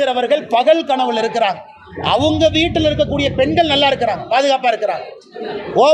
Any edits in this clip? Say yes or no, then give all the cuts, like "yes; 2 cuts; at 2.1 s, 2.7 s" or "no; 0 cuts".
no; 0 cuts